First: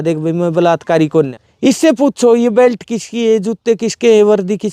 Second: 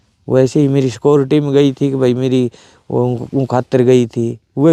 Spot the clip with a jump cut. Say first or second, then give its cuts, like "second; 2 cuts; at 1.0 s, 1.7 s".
first; 1 cut; at 1.4 s